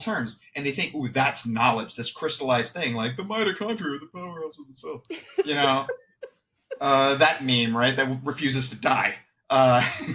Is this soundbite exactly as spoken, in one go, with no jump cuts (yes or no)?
yes